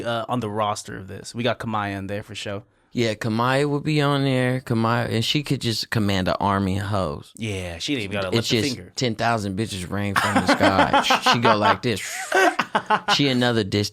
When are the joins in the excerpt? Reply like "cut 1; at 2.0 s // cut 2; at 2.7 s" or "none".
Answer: none

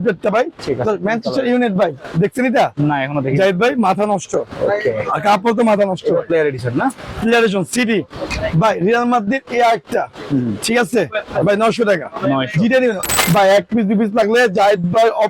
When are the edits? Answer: cut 1; at 13.1 s

